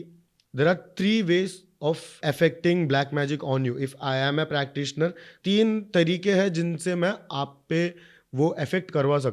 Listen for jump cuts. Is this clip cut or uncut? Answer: cut